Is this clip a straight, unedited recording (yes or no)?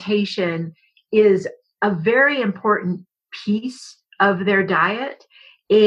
yes